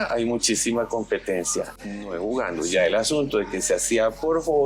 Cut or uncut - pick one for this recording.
uncut